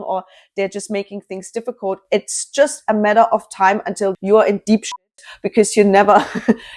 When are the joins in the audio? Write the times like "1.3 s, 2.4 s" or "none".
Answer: 4.1 s